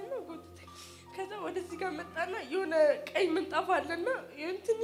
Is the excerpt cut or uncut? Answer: uncut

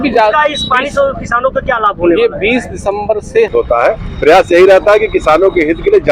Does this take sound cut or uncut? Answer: cut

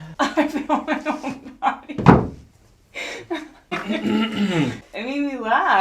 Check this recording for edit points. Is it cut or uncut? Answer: cut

